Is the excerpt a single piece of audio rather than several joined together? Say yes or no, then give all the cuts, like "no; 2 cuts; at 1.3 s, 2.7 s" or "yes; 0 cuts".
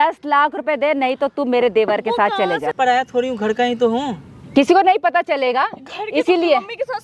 no; 1 cut; at 2.7 s